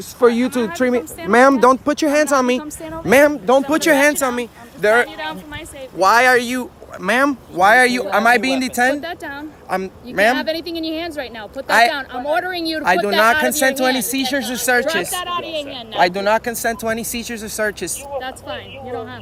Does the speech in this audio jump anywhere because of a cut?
no; 0 cuts

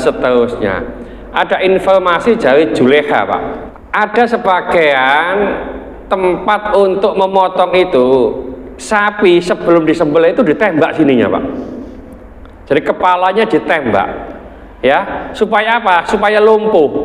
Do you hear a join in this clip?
yes; 1 cut; at 3.6 s

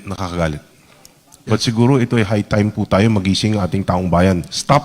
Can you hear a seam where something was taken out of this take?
no; 0 cuts

